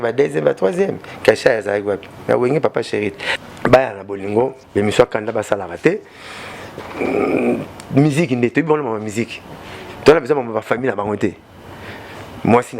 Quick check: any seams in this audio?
yes; 1 cut; at 3.3 s

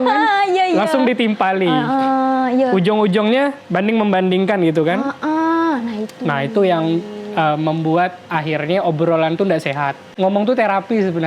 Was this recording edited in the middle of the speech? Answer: yes; 1 cut; at 10.1 s

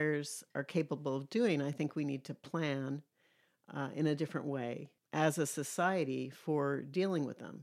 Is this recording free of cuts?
no; 1 cut; at 4.9 s

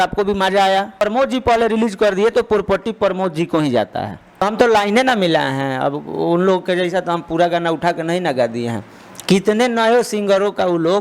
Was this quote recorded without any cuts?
no; 2 cuts; at 1.0 s, 4.4 s

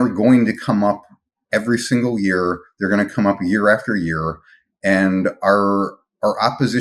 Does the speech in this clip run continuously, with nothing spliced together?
yes; 0 cuts

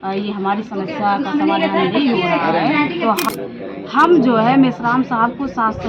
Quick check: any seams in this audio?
yes; 1 cut; at 3.3 s

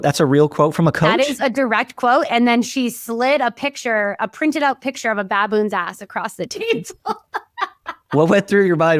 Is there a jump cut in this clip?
no; 0 cuts

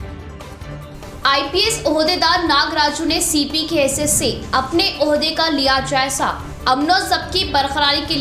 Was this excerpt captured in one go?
yes; 0 cuts

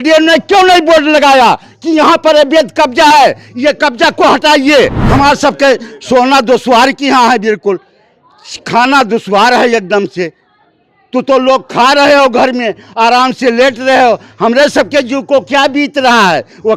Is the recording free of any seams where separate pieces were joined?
no; 1 cut; at 5.0 s

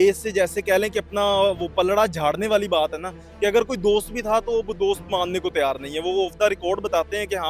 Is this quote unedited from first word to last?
yes; 0 cuts

